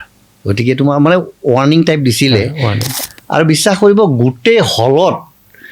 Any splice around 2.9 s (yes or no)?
yes